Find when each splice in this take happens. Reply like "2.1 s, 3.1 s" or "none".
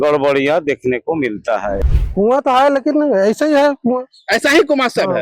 1.8 s